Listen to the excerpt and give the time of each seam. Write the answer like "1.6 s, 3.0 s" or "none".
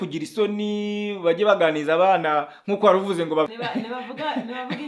3.6 s